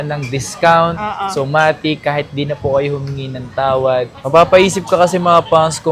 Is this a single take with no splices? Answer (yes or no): no